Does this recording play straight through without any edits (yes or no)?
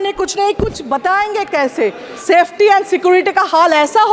no